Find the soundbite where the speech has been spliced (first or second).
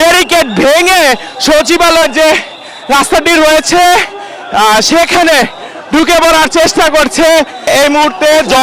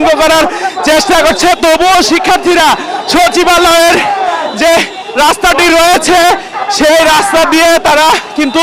first